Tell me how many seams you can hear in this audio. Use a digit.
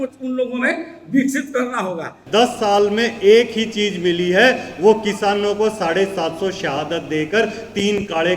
1